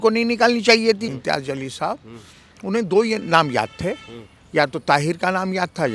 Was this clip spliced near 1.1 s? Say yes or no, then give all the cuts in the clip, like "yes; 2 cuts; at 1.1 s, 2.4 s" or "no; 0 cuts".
yes; 1 cut; at 1.1 s